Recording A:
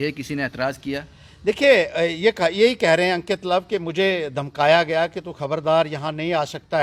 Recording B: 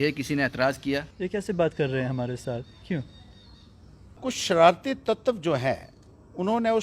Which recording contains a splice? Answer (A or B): B